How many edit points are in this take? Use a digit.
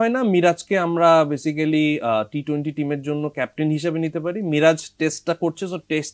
0